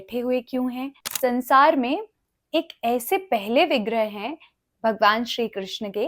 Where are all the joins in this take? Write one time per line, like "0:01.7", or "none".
0:01.0